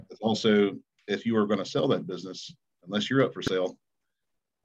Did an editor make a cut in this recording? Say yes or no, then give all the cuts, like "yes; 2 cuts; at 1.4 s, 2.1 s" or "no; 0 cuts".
no; 0 cuts